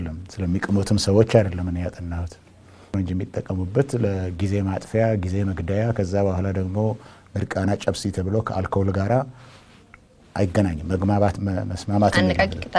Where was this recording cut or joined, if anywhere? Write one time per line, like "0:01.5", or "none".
0:02.9